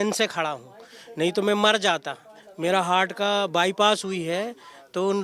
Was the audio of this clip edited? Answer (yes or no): no